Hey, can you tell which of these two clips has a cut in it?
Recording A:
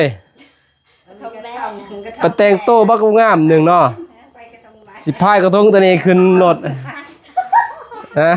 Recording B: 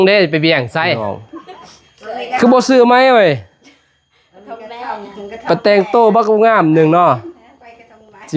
B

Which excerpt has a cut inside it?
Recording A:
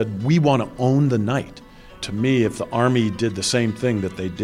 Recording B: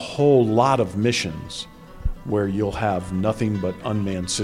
A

